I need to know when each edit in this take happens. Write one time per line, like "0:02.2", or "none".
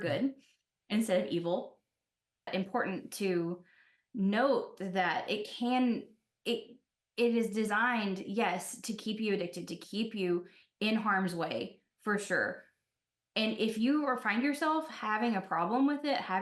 0:02.4